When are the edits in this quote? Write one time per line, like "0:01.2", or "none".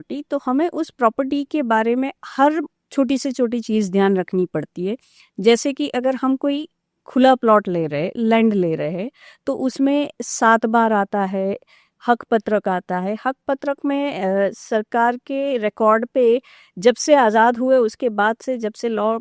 none